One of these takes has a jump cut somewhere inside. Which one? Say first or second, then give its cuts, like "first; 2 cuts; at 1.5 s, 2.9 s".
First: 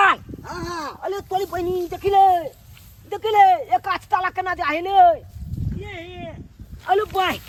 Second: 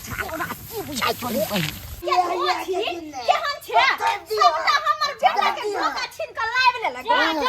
second; 1 cut; at 1.9 s